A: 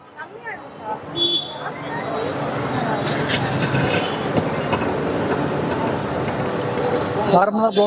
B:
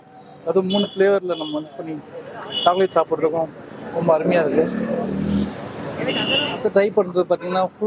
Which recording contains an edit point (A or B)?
B